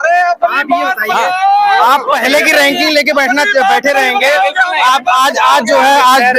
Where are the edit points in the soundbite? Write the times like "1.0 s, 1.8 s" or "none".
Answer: none

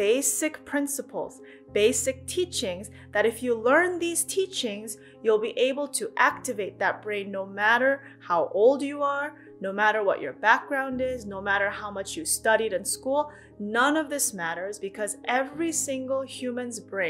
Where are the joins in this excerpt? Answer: none

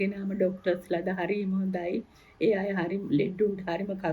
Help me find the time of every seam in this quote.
none

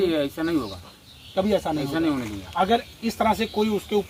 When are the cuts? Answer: none

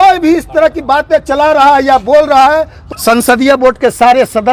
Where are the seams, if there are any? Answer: 2.9 s

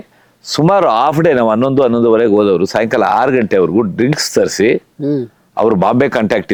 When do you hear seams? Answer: none

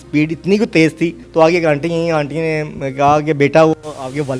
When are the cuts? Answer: 1.2 s

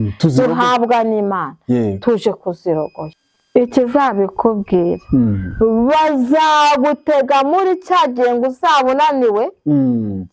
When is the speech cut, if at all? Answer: 3.0 s

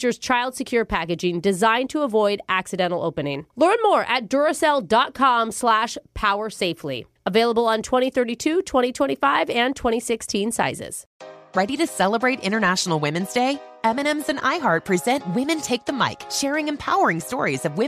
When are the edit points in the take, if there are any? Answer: 11.1 s

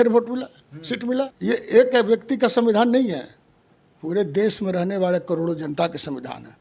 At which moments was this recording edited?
1.3 s

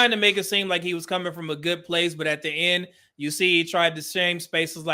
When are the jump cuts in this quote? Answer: none

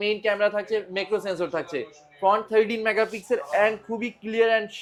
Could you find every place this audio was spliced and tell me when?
none

